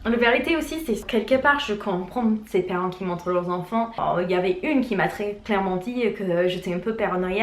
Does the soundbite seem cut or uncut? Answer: cut